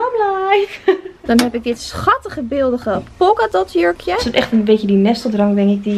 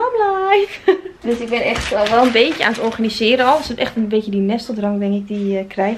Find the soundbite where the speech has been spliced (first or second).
first